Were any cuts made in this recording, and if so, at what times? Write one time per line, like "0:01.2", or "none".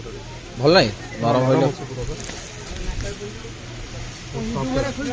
none